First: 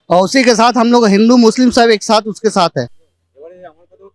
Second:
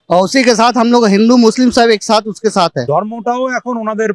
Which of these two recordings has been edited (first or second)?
second